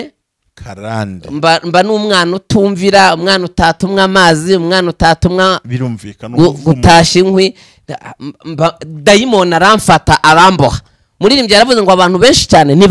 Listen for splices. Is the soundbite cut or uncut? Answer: uncut